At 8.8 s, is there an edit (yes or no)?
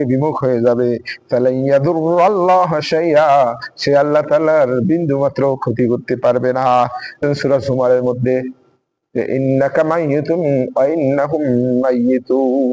no